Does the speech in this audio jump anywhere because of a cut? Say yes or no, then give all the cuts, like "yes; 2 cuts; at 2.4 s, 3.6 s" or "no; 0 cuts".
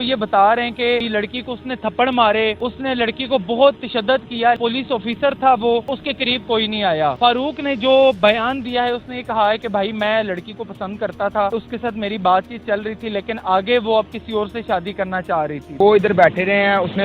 yes; 7 cuts; at 1.1 s, 2.7 s, 4.6 s, 6.0 s, 7.2 s, 11.5 s, 15.7 s